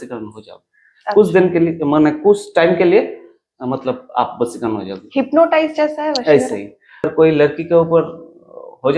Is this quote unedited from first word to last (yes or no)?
no